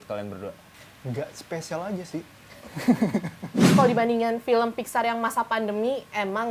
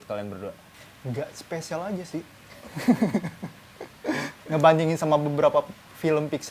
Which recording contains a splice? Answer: first; 1 cut; at 3.7 s

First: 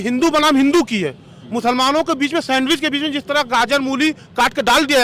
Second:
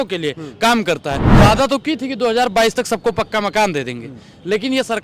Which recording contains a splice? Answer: second; 1 cut; at 1.2 s

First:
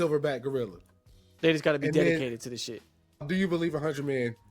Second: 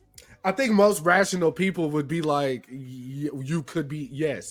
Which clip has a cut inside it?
first; 1 cut; at 3.3 s

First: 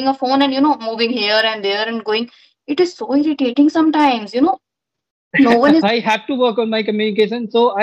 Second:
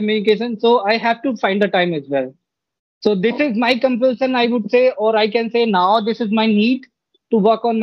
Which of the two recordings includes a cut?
first; 1 cut; at 5.9 s

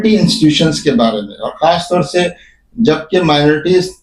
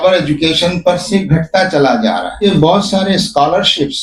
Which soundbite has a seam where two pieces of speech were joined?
second; 1 cut; at 2.4 s

